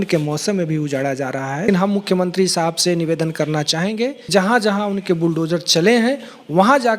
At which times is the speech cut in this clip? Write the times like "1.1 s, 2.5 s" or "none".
1.7 s, 4.3 s